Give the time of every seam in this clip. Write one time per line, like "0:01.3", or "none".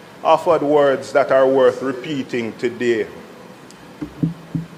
none